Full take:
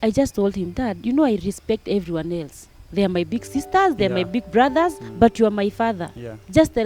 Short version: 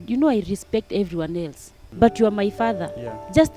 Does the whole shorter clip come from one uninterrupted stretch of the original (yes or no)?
no